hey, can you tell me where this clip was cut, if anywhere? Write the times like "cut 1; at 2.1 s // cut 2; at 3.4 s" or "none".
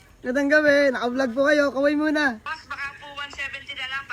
cut 1; at 2.6 s